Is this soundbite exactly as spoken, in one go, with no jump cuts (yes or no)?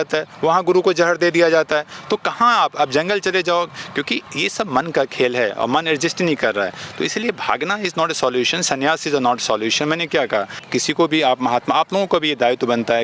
no